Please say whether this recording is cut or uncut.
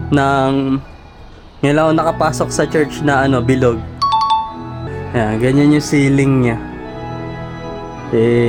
uncut